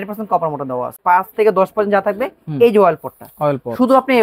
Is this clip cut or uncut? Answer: cut